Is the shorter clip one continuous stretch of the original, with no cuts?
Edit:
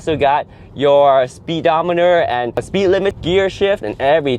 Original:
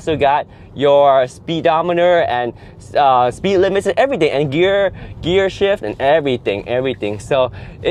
no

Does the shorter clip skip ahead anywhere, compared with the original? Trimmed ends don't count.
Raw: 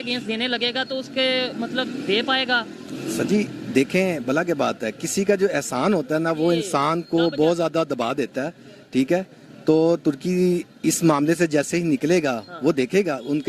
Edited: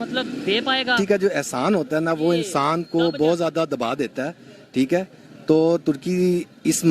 yes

